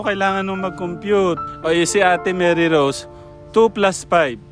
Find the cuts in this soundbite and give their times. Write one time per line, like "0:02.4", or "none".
0:01.5